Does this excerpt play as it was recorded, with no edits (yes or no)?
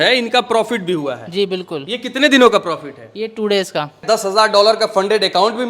no